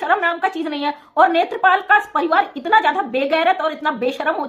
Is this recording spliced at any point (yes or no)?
no